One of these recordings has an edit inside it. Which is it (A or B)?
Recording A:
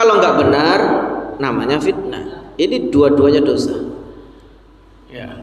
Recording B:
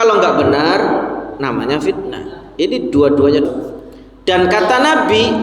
B